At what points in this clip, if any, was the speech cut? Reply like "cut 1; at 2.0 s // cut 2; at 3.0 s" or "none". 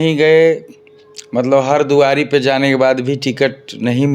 none